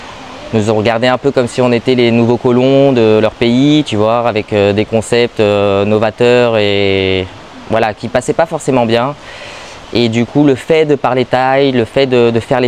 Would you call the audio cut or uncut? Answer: uncut